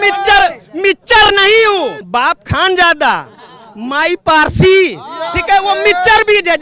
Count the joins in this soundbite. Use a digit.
1